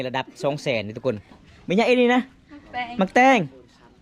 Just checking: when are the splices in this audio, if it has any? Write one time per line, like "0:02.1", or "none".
0:01.5